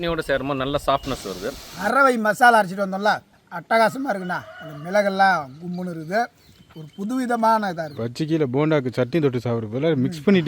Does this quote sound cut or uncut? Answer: cut